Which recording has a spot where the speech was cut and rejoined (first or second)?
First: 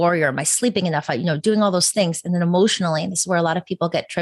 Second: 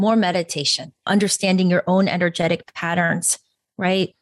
second